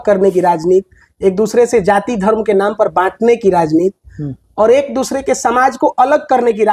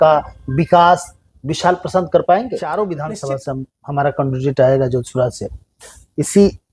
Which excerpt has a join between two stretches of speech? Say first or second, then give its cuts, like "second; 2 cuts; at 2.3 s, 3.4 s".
second; 1 cut; at 2.6 s